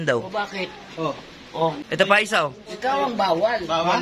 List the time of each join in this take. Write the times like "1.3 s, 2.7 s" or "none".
1.8 s